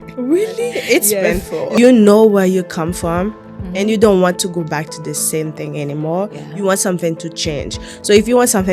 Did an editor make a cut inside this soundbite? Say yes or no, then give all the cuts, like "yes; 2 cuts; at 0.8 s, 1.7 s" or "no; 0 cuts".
yes; 1 cut; at 1.8 s